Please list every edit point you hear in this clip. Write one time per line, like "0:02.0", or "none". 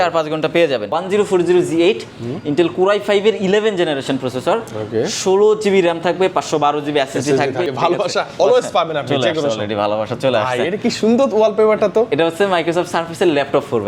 0:00.9
0:07.6